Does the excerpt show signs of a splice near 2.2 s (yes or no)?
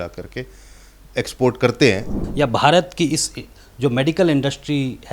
yes